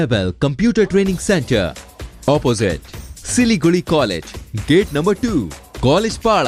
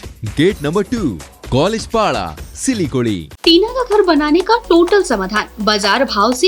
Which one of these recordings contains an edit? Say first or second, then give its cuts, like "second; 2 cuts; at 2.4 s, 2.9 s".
second; 1 cut; at 3.3 s